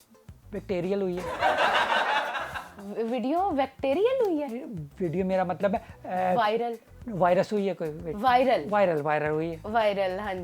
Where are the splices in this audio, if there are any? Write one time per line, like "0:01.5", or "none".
none